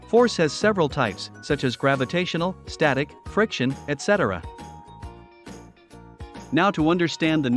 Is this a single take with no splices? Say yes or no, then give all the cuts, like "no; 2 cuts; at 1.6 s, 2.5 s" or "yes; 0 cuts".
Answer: no; 2 cuts; at 4.4 s, 6.5 s